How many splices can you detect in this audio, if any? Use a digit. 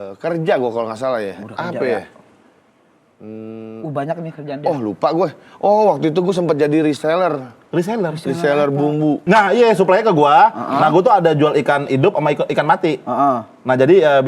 1